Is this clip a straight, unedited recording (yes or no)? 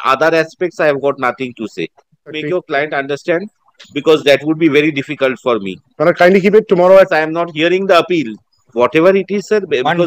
no